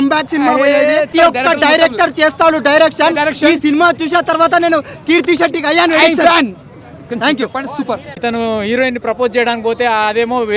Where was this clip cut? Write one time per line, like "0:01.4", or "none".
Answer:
0:01.1
0:08.1